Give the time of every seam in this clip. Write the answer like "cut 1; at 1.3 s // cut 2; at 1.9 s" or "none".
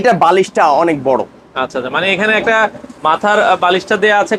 none